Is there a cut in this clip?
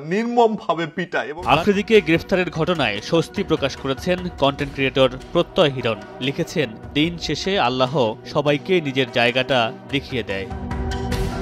yes; 1 cut; at 1.6 s

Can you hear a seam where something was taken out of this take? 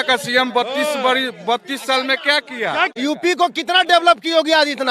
yes; 1 cut; at 2.9 s

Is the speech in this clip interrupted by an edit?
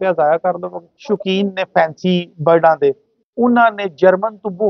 yes; 1 cut; at 1.0 s

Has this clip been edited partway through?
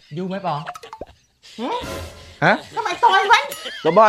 no; 0 cuts

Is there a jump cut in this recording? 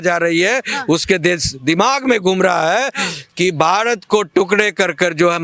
no; 0 cuts

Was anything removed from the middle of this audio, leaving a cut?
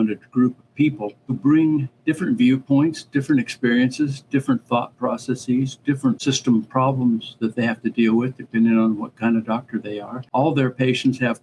yes; 3 cuts; at 1.4 s, 6.2 s, 10.2 s

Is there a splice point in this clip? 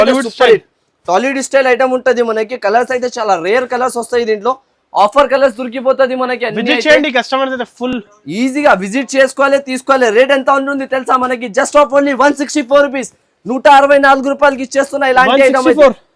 no; 0 cuts

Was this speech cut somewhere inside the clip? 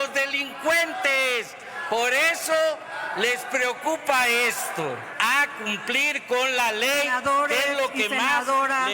yes; 1 cut; at 5.1 s

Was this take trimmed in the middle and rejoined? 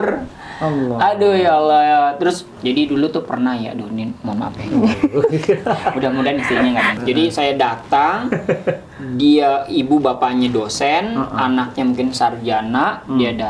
yes; 2 cuts; at 2.5 s, 6.9 s

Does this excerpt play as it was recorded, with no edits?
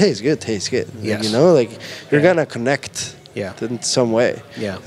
yes; 0 cuts

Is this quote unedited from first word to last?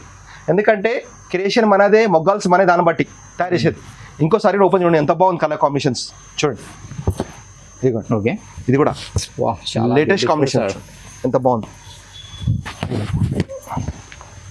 yes; 0 cuts

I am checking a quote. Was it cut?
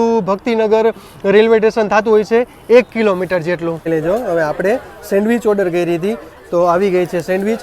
yes; 1 cut; at 3.8 s

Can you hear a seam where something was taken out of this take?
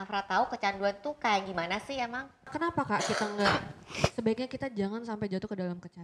yes; 1 cut; at 2.5 s

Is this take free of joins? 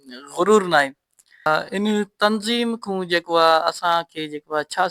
no; 1 cut; at 1.5 s

